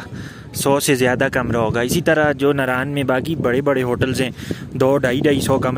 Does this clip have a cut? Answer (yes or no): no